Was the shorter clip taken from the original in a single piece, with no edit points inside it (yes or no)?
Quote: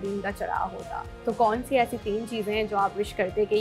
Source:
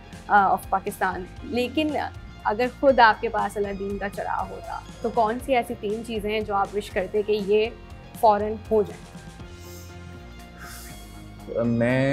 yes